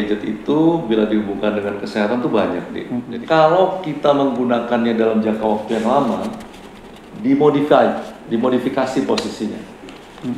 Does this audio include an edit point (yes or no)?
yes